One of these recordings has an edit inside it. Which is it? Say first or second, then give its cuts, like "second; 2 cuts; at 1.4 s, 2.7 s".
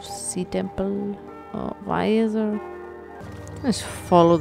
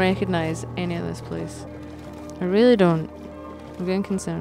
second; 1 cut; at 1.7 s